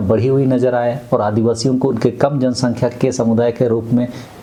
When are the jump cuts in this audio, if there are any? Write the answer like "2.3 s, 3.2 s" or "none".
none